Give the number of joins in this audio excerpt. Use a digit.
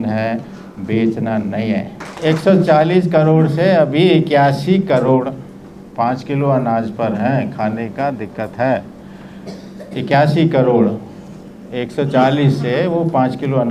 1